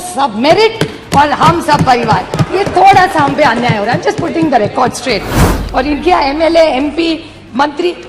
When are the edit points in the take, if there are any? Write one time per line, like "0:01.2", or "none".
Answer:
0:05.5